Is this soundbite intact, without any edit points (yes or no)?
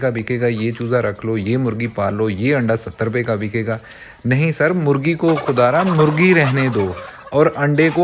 yes